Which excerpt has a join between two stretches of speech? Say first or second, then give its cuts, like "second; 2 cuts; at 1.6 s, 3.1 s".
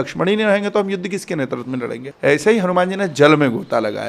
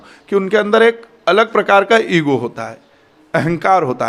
first; 1 cut; at 2.0 s